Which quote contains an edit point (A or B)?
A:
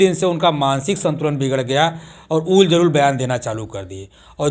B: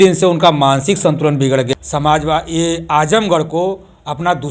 B